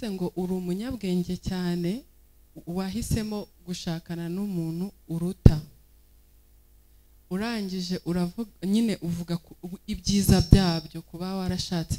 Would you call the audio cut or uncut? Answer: uncut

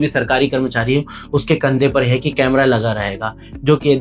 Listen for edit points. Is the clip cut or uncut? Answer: uncut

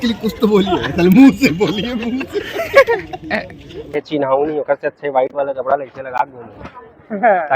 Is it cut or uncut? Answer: cut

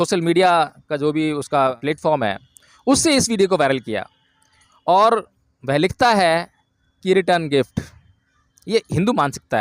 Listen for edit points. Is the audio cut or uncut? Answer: cut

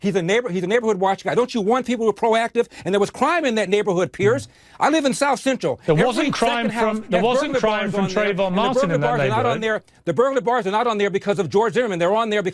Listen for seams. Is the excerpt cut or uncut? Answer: uncut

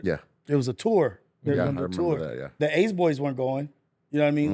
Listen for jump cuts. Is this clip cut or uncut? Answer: cut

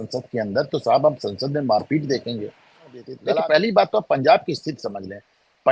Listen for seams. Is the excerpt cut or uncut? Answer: cut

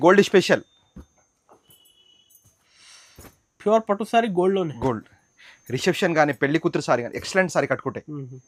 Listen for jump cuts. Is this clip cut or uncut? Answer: uncut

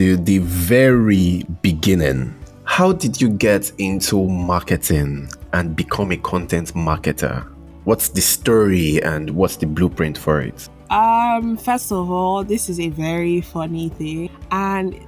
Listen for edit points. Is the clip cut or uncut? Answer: uncut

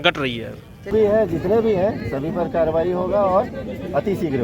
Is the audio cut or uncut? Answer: cut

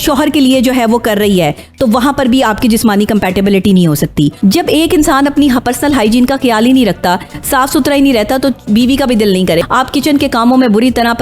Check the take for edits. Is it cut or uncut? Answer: cut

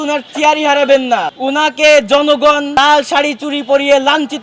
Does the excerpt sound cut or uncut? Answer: cut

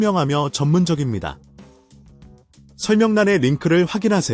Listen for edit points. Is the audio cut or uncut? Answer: cut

